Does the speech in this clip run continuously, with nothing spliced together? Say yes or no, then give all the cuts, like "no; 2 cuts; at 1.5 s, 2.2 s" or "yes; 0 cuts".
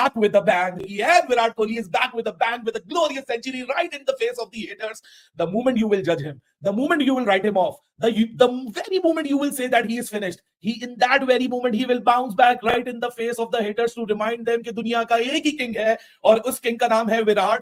yes; 0 cuts